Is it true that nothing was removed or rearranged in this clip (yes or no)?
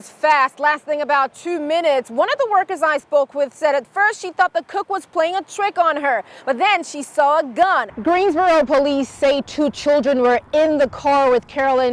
no